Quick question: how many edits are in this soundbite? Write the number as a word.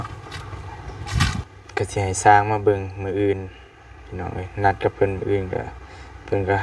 one